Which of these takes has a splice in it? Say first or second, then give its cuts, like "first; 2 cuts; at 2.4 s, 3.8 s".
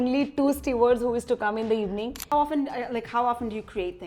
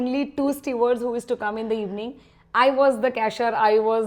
first; 1 cut; at 2.2 s